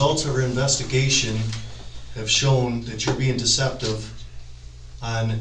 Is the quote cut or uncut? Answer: uncut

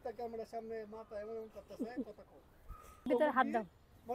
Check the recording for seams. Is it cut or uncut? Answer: cut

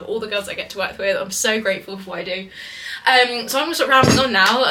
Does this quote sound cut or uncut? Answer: uncut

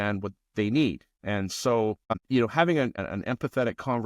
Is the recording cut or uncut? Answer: cut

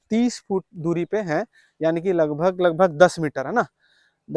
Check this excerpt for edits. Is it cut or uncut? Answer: uncut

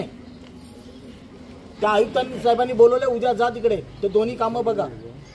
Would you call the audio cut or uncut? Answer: cut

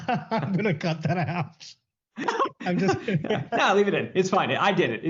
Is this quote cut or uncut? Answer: uncut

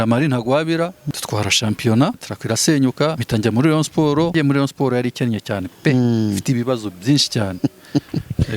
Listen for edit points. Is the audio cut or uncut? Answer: cut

